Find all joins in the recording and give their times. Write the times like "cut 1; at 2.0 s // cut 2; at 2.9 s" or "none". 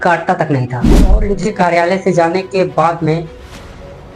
cut 1; at 1.1 s